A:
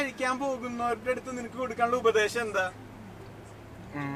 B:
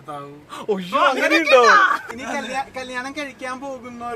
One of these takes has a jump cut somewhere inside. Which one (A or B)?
B